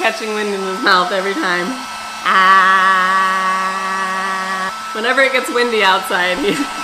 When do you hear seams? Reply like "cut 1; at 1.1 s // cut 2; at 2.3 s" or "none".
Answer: none